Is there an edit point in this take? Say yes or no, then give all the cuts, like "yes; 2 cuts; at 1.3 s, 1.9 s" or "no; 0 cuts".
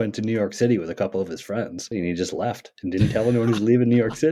yes; 1 cut; at 1.9 s